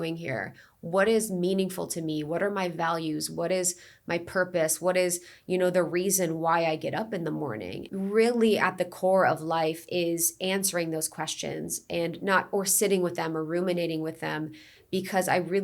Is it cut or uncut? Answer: cut